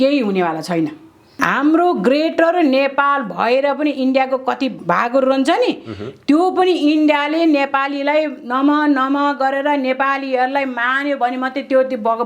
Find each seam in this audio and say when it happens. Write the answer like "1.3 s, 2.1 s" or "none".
1.4 s, 4.8 s